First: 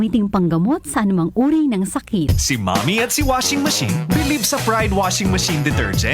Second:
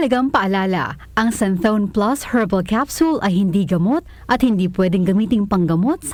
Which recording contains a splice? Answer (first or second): first